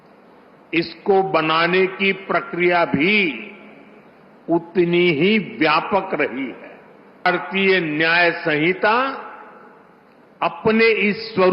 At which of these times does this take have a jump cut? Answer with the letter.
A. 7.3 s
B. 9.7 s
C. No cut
A